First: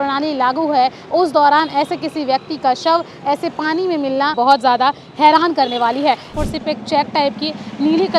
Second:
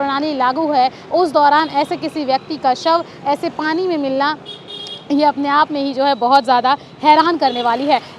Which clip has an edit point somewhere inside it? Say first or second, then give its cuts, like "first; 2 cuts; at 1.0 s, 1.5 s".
first; 2 cuts; at 4.3 s, 6.3 s